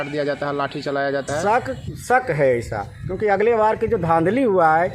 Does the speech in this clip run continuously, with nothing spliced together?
no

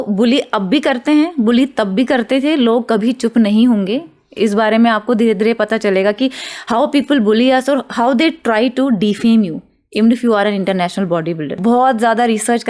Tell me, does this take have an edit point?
yes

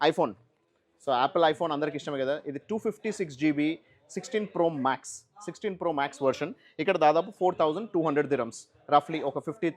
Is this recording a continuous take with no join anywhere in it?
yes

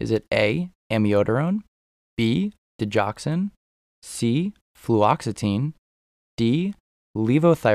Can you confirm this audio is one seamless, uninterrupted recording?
yes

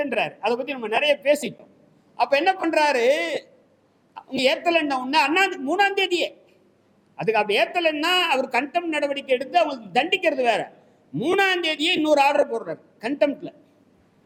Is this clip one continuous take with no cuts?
yes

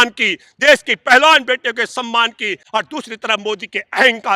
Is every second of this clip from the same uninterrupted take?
no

